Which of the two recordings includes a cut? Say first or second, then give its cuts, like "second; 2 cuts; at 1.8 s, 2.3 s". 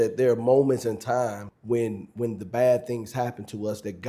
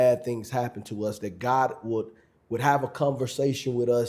first; 1 cut; at 1.5 s